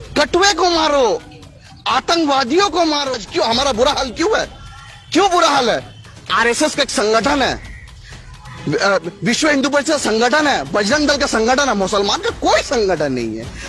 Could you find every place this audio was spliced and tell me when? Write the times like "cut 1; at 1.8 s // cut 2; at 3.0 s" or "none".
cut 1; at 3.1 s